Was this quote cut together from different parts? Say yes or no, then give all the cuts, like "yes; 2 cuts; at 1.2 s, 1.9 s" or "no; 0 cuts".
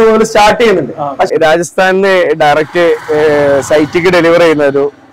yes; 1 cut; at 1.3 s